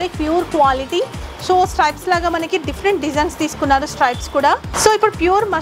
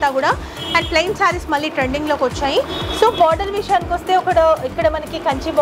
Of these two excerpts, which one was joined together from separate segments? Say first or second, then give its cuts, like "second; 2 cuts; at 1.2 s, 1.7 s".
first; 1 cut; at 4.7 s